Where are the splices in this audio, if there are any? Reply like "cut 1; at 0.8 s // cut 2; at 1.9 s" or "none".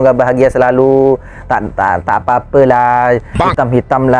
none